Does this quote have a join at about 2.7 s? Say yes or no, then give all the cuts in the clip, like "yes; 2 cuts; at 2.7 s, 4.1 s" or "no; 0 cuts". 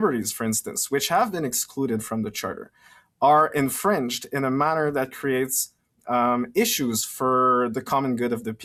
no; 0 cuts